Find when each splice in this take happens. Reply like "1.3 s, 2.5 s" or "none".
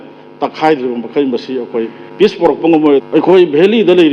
2.0 s, 3.0 s